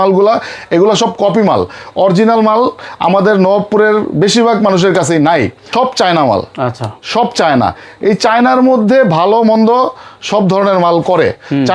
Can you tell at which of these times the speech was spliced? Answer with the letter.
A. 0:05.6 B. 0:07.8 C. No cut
A